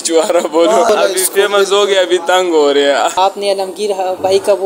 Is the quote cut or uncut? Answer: cut